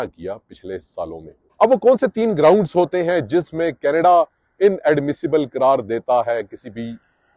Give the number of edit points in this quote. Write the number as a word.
one